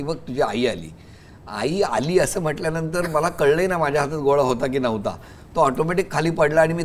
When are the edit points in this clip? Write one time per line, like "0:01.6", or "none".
none